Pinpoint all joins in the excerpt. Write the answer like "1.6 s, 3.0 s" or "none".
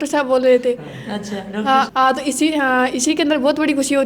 none